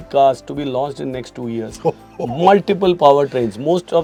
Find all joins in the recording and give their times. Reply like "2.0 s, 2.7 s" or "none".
none